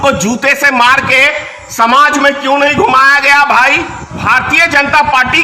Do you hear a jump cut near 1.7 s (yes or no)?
no